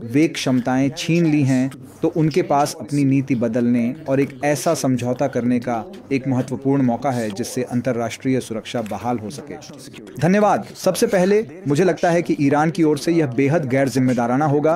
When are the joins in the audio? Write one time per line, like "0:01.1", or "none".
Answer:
none